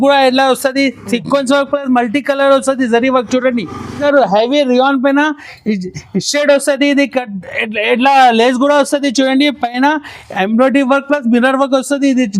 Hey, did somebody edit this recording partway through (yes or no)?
yes